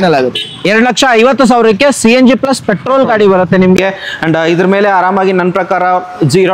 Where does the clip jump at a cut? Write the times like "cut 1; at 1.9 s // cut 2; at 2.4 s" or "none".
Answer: cut 1; at 3.8 s

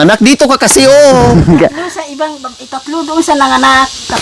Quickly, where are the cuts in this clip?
none

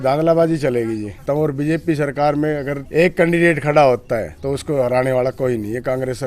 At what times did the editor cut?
cut 1; at 1.2 s // cut 2; at 2.8 s // cut 3; at 4.3 s

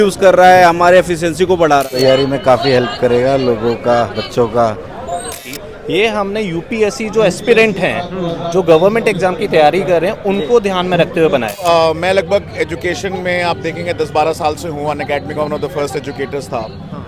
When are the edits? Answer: cut 1; at 1.9 s // cut 2; at 5.3 s // cut 3; at 11.6 s

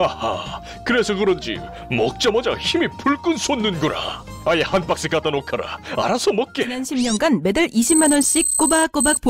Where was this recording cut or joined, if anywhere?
cut 1; at 6.7 s

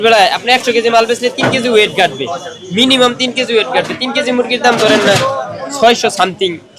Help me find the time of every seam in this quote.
none

